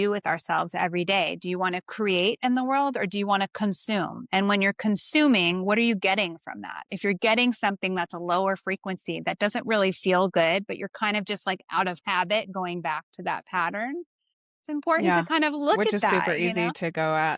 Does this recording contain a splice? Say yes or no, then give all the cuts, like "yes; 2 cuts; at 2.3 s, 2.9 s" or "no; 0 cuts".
no; 0 cuts